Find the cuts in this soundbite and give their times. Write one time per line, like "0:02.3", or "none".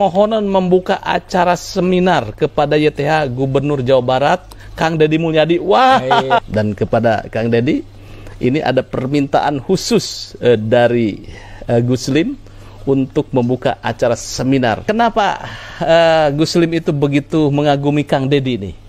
0:06.4
0:14.8